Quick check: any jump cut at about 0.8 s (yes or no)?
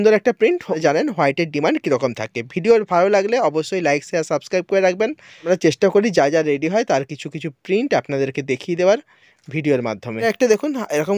yes